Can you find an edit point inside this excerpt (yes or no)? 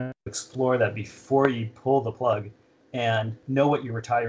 no